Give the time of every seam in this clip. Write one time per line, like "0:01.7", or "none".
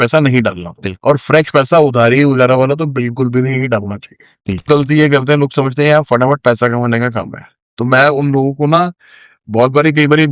0:04.7